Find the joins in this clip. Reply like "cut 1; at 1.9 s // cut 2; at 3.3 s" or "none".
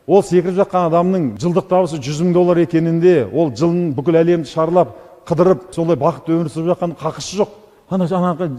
cut 1; at 1.3 s // cut 2; at 5.7 s